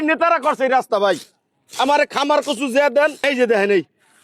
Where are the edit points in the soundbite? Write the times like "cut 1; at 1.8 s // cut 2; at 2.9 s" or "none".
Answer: cut 1; at 3.2 s